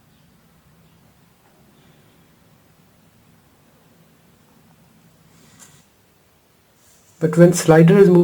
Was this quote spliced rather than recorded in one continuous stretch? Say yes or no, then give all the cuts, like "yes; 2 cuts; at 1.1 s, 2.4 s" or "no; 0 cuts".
yes; 1 cut; at 5.8 s